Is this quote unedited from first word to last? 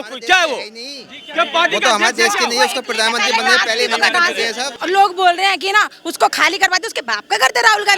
no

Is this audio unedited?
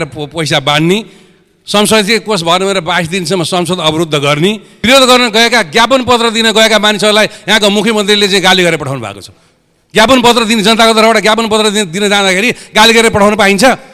no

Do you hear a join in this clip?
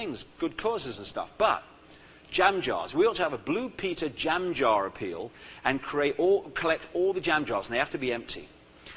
no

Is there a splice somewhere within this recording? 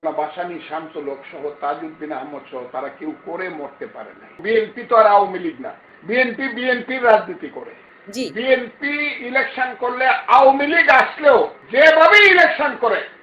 yes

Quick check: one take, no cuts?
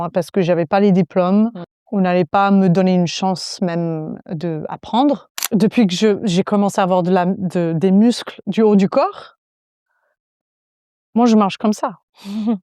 no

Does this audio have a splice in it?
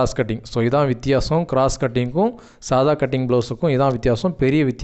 no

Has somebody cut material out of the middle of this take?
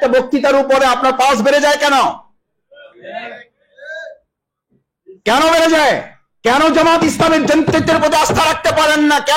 no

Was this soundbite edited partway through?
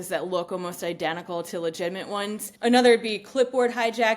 yes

